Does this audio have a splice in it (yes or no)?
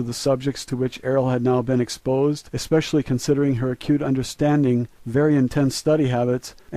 yes